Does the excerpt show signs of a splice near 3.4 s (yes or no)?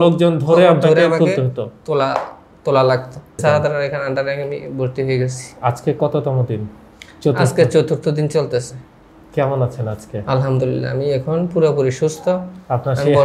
yes